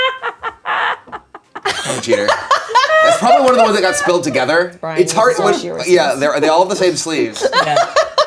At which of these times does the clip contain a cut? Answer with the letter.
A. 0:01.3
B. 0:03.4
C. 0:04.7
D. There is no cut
C